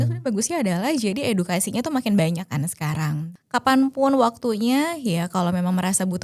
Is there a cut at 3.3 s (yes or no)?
yes